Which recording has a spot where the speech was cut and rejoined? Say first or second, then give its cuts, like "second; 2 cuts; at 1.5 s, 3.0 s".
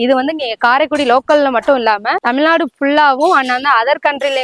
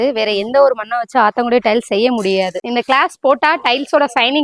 second; 1 cut; at 2.6 s